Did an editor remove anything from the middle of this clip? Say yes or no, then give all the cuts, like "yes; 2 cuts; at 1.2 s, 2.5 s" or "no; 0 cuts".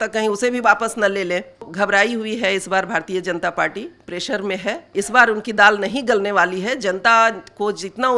yes; 2 cuts; at 1.7 s, 4.9 s